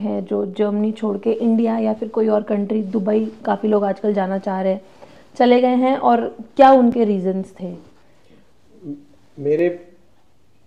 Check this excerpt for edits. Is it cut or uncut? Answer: uncut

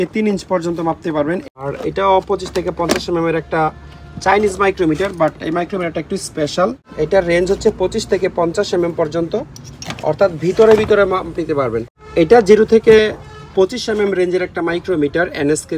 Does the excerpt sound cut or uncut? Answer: cut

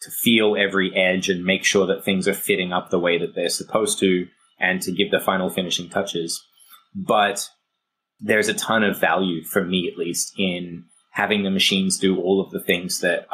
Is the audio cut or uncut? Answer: uncut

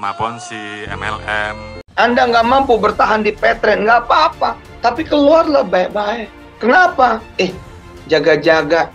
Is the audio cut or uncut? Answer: cut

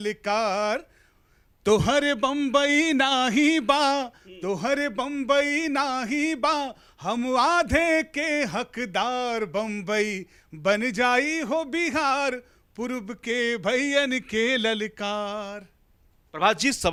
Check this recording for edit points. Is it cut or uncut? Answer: uncut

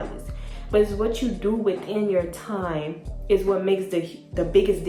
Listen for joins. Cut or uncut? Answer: uncut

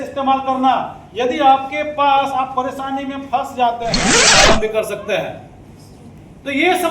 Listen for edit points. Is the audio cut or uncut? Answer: cut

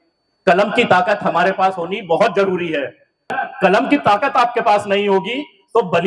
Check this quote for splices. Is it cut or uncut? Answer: cut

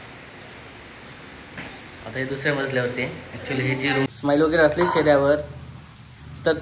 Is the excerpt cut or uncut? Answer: cut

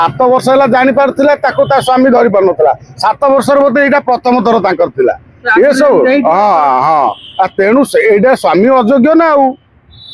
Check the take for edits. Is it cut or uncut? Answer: uncut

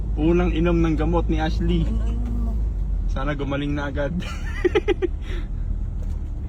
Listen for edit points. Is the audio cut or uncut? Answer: uncut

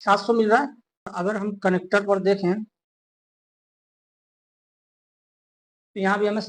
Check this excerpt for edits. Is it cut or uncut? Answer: cut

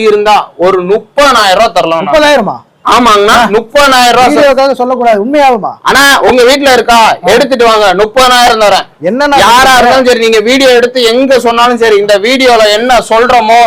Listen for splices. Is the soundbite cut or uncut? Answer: uncut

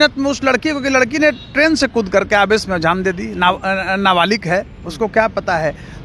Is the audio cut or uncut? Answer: uncut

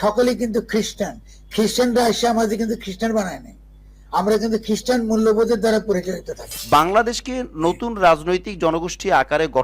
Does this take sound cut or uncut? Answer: cut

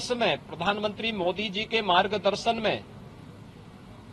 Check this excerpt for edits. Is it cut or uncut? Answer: uncut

